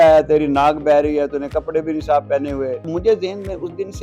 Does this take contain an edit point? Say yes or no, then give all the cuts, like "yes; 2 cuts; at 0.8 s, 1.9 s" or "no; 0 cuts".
yes; 1 cut; at 2.8 s